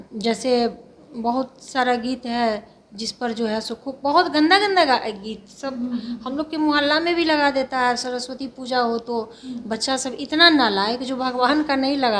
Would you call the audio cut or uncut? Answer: uncut